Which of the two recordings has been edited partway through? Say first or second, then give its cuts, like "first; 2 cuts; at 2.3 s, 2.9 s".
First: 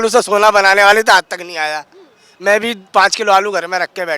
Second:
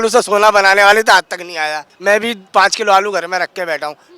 second; 1 cut; at 1.9 s